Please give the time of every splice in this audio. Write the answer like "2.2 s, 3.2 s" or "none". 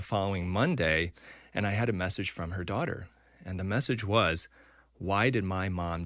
none